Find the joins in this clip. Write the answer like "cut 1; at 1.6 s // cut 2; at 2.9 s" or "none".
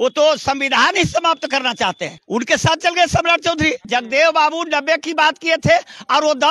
cut 1; at 2.1 s // cut 2; at 3.8 s